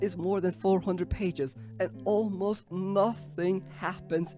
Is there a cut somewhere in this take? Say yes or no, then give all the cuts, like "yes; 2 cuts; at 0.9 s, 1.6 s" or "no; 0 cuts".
no; 0 cuts